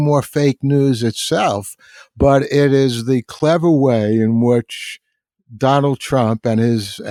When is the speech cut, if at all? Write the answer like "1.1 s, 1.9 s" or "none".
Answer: none